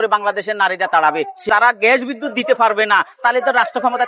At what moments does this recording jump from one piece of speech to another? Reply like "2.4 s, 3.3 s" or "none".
1.5 s